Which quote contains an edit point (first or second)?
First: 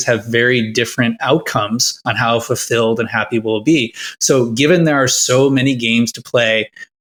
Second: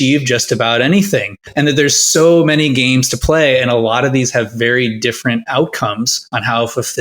second